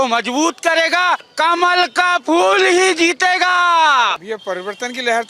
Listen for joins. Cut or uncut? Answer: cut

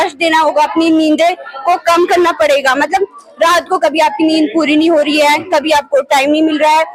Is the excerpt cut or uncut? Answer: uncut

